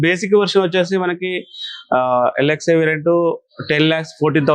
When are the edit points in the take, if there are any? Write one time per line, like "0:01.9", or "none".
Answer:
none